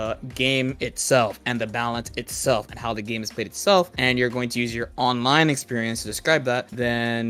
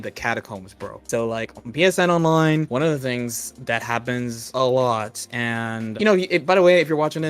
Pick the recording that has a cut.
second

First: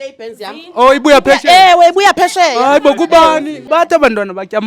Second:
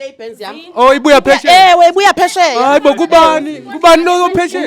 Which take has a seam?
first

